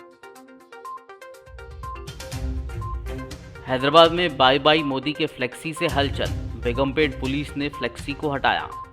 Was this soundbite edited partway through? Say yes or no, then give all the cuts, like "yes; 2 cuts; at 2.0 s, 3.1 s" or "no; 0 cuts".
yes; 1 cut; at 1.0 s